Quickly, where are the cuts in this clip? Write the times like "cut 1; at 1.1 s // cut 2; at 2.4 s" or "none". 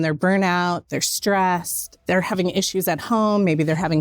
cut 1; at 1.9 s